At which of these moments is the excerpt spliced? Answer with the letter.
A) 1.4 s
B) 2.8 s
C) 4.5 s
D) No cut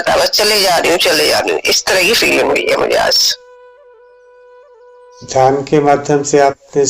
D